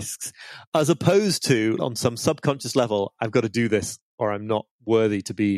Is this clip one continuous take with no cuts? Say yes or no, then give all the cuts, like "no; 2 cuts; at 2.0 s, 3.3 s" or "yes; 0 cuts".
no; 2 cuts; at 1.8 s, 4.7 s